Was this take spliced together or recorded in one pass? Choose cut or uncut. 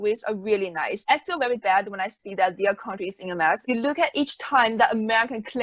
cut